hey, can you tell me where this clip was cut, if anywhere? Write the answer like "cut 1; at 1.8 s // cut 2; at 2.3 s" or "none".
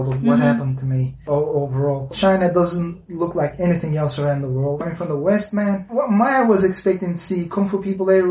cut 1; at 1.2 s // cut 2; at 2.1 s // cut 3; at 4.8 s // cut 4; at 5.9 s